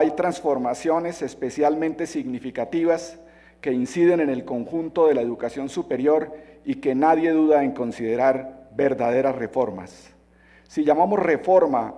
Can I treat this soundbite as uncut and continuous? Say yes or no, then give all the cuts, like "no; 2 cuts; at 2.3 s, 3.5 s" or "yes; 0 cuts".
no; 1 cut; at 4.9 s